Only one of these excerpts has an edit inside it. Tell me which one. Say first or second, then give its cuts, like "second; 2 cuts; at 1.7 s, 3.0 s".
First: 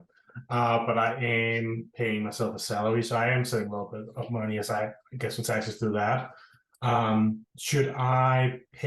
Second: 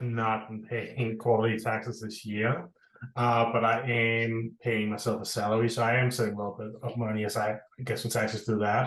first; 1 cut; at 7.5 s